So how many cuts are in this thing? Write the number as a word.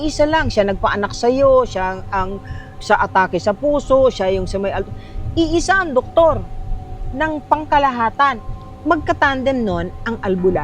one